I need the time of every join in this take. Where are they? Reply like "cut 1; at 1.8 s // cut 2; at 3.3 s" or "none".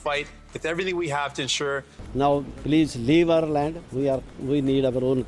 cut 1; at 1.9 s